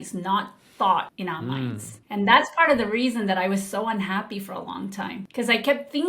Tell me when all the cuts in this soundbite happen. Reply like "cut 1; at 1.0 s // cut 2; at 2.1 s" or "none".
cut 1; at 1.2 s // cut 2; at 5.2 s